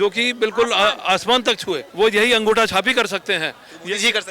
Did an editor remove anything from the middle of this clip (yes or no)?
yes